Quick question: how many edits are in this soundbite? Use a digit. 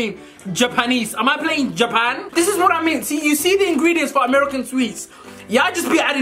1